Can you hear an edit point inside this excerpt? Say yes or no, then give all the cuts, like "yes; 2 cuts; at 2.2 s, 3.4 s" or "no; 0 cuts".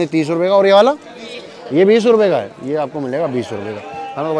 no; 0 cuts